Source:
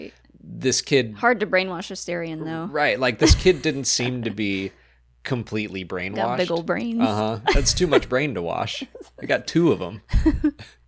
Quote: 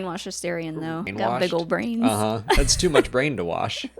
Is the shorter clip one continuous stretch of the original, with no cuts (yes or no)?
no